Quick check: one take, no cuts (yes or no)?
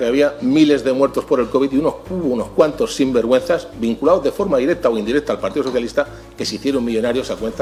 yes